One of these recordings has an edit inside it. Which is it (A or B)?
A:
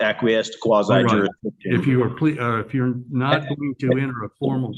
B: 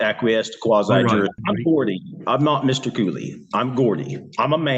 B